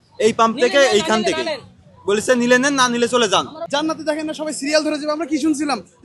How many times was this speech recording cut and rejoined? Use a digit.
1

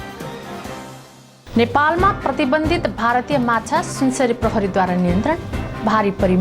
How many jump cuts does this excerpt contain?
1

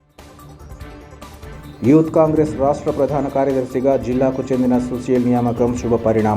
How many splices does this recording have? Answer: 1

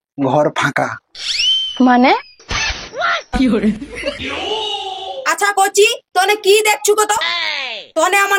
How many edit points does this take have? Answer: 1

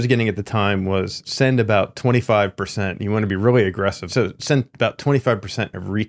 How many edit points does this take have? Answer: 2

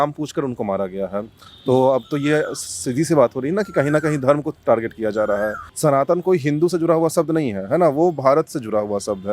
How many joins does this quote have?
1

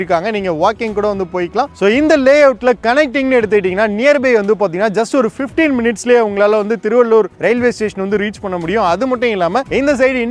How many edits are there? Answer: 1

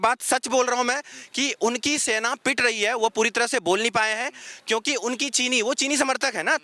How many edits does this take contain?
0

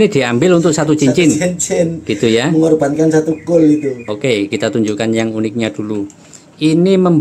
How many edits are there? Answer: 1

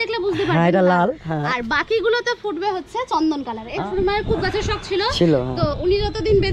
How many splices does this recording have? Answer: 1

